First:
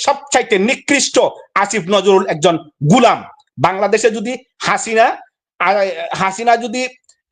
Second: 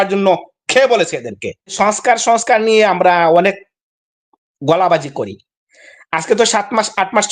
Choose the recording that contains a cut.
second; 1 cut; at 1.7 s

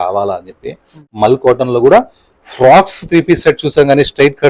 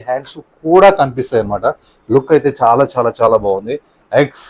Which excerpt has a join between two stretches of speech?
first; 1 cut; at 0.9 s

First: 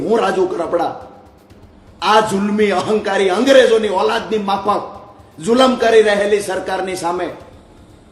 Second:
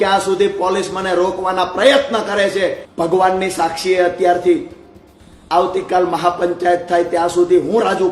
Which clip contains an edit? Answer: second; 1 cut; at 2.8 s

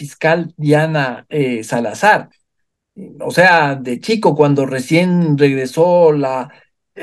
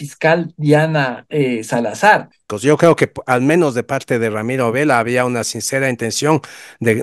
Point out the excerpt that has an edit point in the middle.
second; 1 cut; at 2.5 s

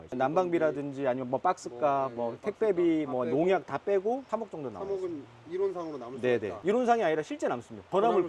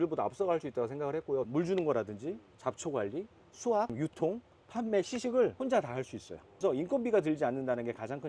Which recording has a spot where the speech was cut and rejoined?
second; 2 cuts; at 1.5 s, 6.6 s

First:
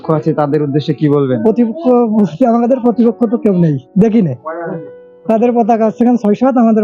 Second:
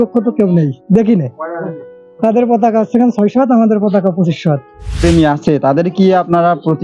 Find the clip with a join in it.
second; 1 cut; at 4.8 s

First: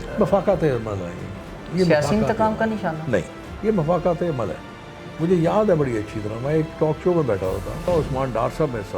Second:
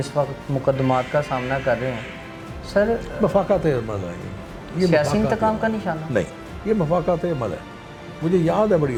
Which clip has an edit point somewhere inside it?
first; 1 cut; at 7.8 s

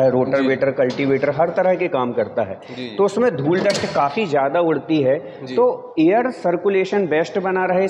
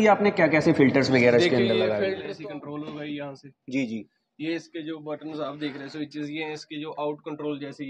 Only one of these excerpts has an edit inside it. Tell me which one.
second; 1 cut; at 2.2 s

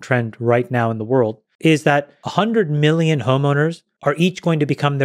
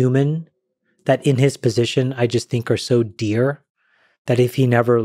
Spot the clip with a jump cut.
first; 3 cuts; at 1.5 s, 2.2 s, 3.9 s

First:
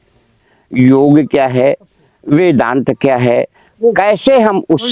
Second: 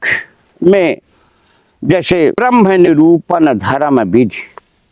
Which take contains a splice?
second; 1 cut; at 2.4 s

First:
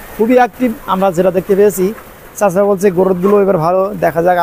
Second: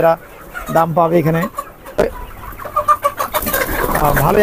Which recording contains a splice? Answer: second; 1 cut; at 2.0 s

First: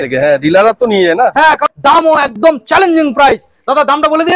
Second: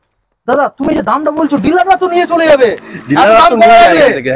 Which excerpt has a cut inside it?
first; 1 cut; at 1.6 s

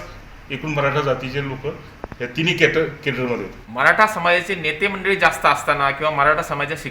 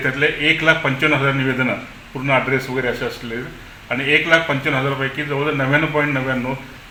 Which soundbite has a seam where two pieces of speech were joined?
first; 1 cut; at 3.6 s

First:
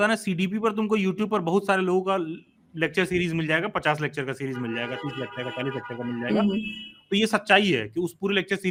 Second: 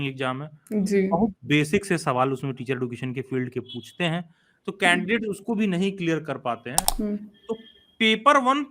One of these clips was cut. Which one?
second; 1 cut; at 6.8 s

